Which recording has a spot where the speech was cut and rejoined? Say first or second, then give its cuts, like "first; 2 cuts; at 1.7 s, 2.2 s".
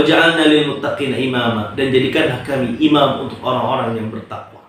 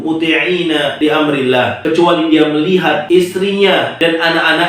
second; 4 cuts; at 0.9 s, 1.8 s, 3.0 s, 3.9 s